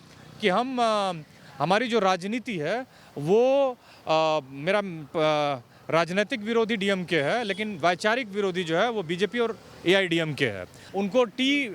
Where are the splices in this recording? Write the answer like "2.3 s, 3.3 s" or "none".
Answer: 10.8 s